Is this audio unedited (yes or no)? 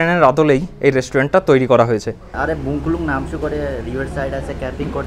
no